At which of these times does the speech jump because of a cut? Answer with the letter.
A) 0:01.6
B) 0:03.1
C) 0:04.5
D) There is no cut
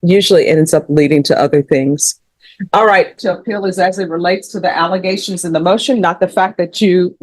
B